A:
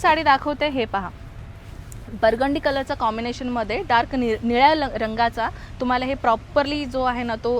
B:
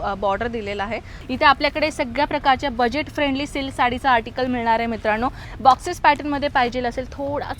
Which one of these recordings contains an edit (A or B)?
B